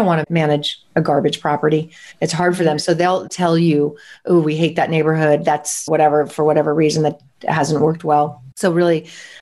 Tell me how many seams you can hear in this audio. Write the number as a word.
zero